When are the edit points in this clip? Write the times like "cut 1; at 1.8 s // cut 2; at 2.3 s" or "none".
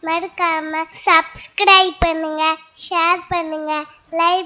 cut 1; at 0.9 s